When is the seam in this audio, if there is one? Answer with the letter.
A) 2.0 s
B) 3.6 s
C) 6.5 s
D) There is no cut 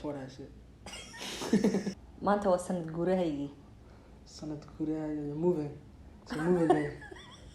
A